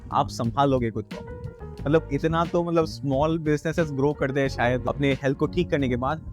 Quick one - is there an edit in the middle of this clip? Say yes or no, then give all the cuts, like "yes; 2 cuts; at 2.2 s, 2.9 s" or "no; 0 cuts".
yes; 2 cuts; at 1.5 s, 4.8 s